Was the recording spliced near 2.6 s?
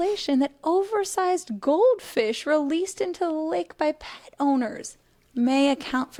no; 0 cuts

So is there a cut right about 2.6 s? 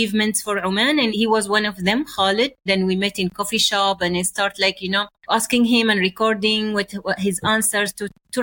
yes; 3 cuts; at 1.1 s, 2.6 s, 5.1 s

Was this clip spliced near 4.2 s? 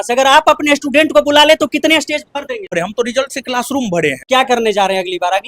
yes; 2 cuts; at 2.7 s, 4.2 s

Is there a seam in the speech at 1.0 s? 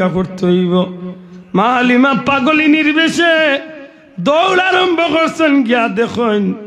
no; 0 cuts

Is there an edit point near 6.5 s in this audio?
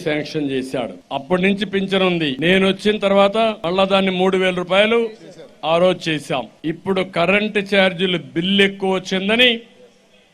yes; 4 cuts; at 1.0 s, 2.3 s, 3.6 s, 6.5 s

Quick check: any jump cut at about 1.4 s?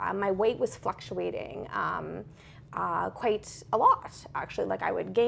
no; 0 cuts

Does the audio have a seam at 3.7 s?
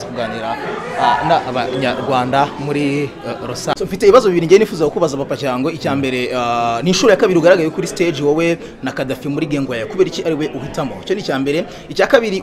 yes; 1 cut; at 3.7 s

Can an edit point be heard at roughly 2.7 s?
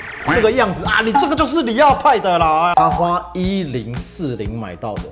yes; 1 cut; at 2.7 s

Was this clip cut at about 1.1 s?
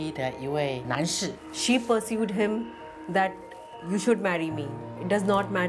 yes; 1 cut; at 1.1 s

